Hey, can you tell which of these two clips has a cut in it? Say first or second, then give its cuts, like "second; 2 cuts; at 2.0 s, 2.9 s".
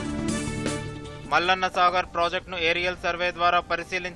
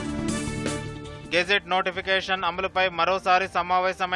first; 1 cut; at 1.1 s